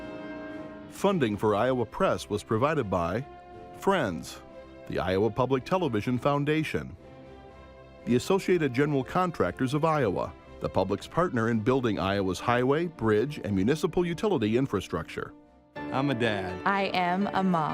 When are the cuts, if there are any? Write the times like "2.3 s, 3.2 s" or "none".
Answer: 1.0 s